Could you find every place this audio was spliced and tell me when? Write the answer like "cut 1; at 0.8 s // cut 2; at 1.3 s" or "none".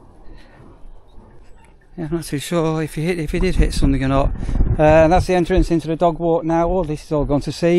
none